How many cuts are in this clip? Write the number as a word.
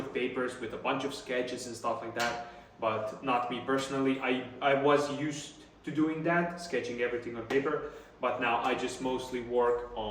zero